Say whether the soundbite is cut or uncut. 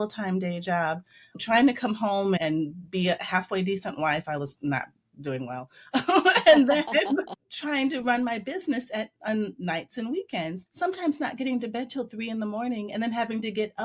cut